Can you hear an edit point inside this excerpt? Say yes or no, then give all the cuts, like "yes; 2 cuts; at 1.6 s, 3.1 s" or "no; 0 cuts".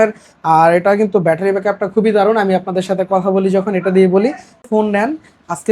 yes; 1 cut; at 4.7 s